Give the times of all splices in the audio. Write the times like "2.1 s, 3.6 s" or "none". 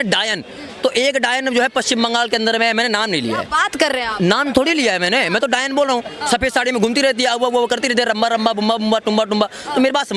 none